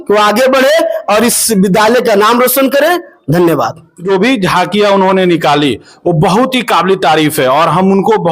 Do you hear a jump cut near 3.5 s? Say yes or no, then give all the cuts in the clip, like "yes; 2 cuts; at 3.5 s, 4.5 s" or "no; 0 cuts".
no; 0 cuts